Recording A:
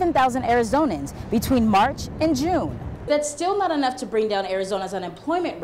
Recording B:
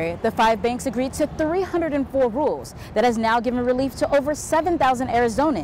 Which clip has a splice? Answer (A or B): A